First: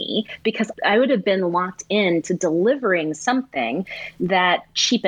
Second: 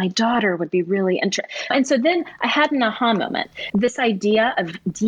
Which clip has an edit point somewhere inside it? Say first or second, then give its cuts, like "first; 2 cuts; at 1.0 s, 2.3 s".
second; 2 cuts; at 1.7 s, 3.6 s